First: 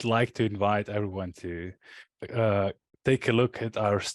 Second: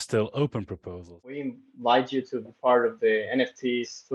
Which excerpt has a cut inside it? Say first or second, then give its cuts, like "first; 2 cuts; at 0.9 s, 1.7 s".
second; 1 cut; at 1.4 s